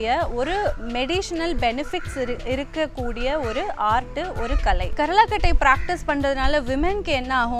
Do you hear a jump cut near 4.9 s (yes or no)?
yes